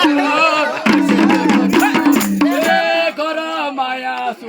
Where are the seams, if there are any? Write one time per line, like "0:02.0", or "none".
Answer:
0:02.7